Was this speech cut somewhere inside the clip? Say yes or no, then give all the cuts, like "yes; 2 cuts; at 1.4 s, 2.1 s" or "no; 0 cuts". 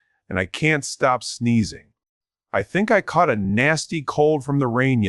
no; 0 cuts